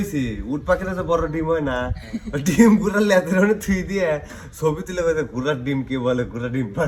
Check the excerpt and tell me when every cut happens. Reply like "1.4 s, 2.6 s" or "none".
none